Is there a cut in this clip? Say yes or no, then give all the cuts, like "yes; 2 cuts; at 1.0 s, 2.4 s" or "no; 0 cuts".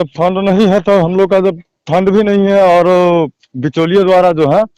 no; 0 cuts